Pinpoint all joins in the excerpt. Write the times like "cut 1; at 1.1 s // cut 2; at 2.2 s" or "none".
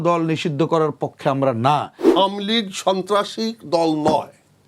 cut 1; at 2.0 s